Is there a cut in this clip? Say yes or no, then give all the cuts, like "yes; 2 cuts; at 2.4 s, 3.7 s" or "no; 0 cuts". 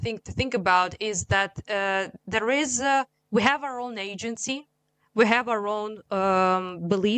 no; 0 cuts